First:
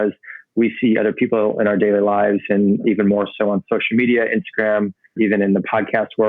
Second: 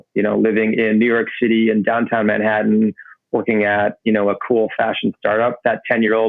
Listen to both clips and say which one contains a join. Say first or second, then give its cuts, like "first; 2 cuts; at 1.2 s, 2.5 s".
first; 2 cuts; at 2.8 s, 5.1 s